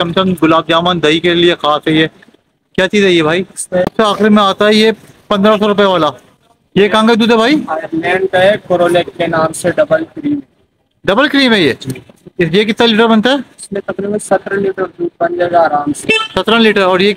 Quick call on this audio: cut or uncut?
cut